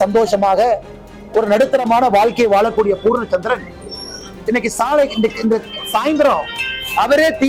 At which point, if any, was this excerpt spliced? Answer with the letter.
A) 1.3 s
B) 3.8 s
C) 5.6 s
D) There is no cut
D